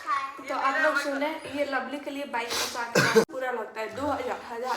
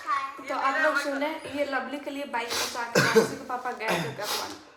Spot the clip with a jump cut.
first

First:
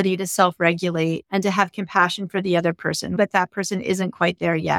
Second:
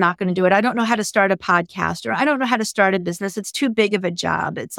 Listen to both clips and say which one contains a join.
first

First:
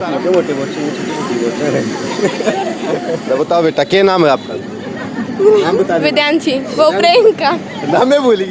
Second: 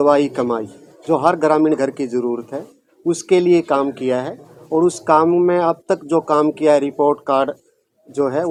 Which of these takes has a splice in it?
first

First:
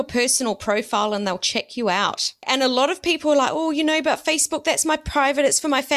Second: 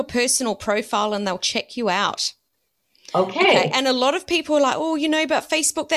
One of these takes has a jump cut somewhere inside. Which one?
first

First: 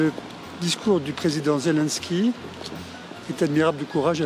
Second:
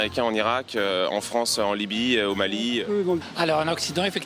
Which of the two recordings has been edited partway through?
second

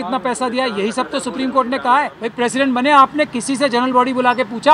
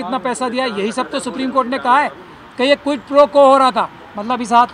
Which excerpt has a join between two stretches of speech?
first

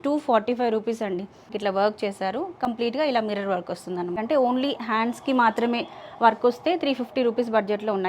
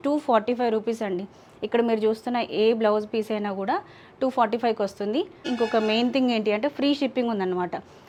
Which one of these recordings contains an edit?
first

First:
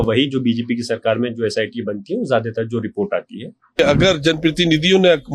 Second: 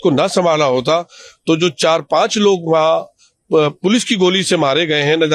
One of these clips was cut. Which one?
first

